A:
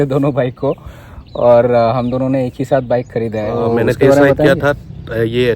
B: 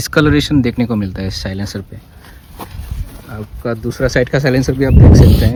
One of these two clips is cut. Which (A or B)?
A